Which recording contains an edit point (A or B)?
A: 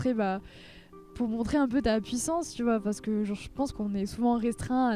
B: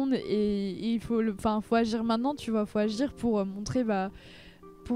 A